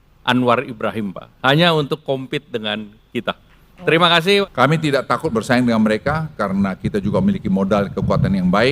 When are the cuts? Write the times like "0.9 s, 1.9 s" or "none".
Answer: 4.4 s